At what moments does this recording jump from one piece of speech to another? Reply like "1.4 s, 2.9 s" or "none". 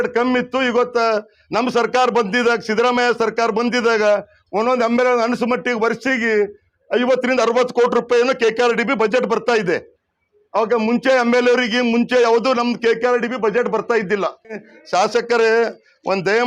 14.7 s